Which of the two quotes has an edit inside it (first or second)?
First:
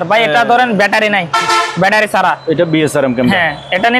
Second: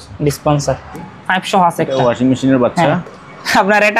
second